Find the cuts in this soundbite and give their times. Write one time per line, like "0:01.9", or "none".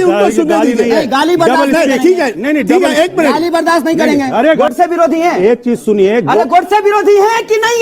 0:04.6